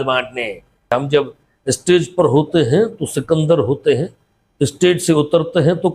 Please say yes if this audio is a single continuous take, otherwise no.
no